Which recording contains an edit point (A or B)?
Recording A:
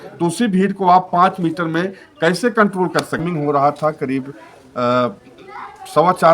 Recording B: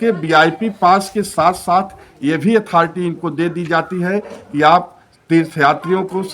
A